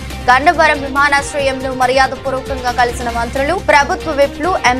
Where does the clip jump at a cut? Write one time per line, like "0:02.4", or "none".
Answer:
none